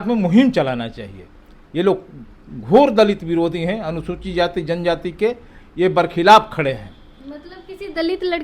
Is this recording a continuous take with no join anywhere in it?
yes; 0 cuts

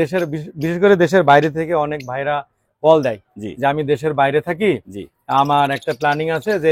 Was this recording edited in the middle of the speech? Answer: no; 0 cuts

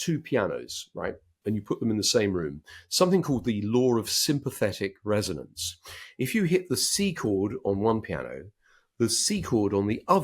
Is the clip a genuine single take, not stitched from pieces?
no; 1 cut; at 1.3 s

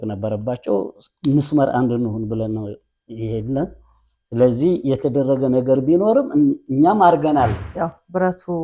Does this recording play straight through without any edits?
no; 1 cut; at 7.6 s

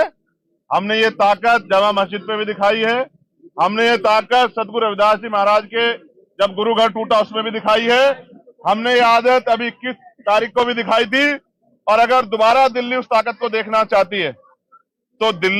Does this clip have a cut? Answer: no; 0 cuts

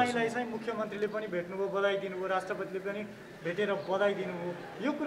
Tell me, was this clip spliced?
no; 0 cuts

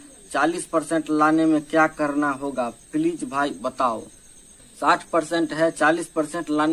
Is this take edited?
no; 0 cuts

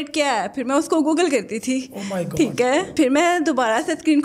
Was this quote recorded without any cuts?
yes; 0 cuts

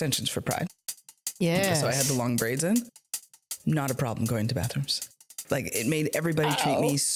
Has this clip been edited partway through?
no; 0 cuts

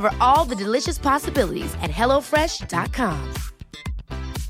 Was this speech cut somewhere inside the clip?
no; 0 cuts

